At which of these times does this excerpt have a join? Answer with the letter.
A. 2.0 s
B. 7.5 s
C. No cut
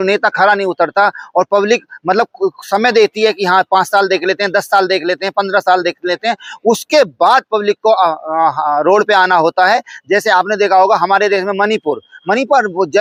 C